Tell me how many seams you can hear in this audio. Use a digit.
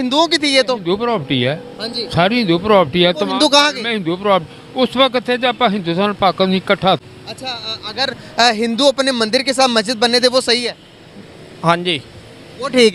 1